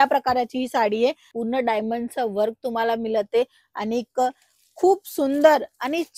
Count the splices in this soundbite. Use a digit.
1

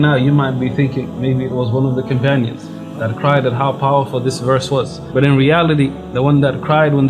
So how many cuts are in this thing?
1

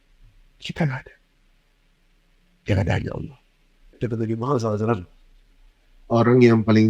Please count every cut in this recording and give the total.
1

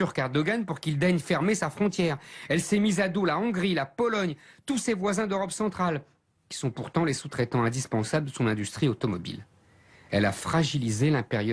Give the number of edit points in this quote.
0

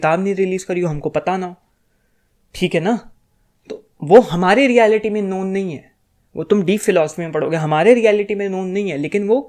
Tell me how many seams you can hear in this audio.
0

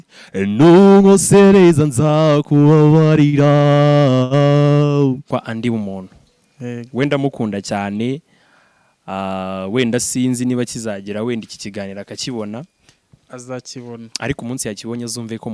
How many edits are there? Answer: 1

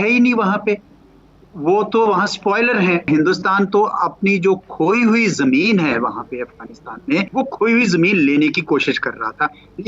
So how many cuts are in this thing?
2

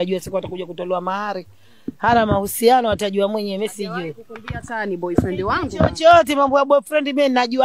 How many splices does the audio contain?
0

